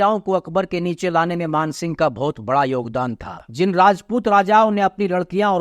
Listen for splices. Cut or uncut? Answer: cut